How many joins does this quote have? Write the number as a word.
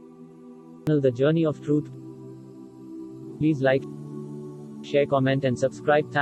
zero